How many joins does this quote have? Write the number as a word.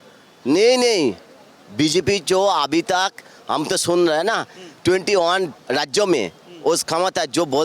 one